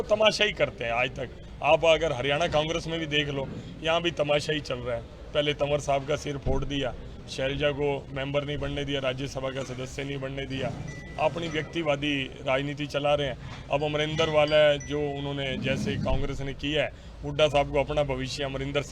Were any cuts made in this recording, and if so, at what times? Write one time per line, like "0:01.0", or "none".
none